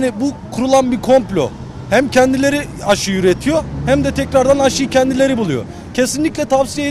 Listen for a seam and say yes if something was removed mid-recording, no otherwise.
no